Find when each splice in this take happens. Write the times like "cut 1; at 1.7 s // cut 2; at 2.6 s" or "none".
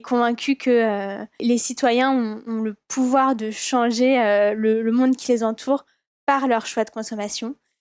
cut 1; at 1.4 s